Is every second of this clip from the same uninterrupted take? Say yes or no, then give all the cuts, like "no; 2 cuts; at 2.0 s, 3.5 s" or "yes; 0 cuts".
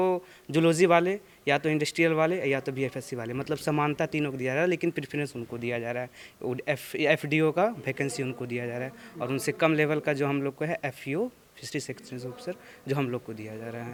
yes; 0 cuts